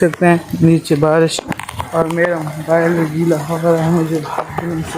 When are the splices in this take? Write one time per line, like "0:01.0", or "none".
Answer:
none